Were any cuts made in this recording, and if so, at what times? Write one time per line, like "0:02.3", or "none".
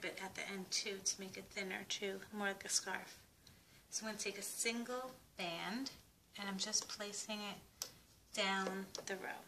0:04.3